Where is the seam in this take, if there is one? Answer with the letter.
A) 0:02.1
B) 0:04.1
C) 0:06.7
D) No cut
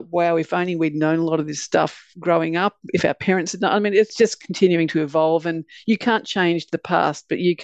B